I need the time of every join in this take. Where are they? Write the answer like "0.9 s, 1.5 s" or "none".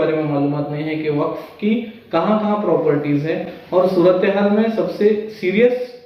none